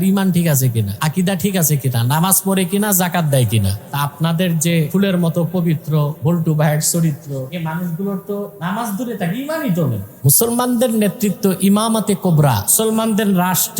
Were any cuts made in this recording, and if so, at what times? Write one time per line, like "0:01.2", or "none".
0:00.9
0:03.8
0:04.9
0:06.1
0:07.5
0:08.5
0:10.1
0:12.7